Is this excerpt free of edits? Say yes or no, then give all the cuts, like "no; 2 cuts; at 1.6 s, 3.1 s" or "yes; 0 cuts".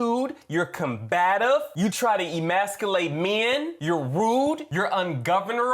yes; 0 cuts